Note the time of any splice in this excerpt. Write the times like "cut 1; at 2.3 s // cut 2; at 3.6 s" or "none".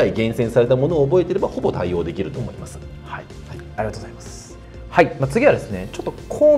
none